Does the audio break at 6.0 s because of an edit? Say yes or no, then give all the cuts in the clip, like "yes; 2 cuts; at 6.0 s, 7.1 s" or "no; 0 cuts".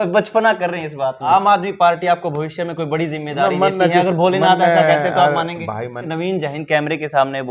yes; 2 cuts; at 1.2 s, 6.0 s